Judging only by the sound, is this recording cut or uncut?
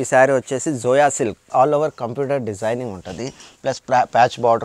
cut